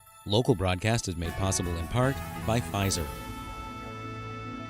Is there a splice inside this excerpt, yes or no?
yes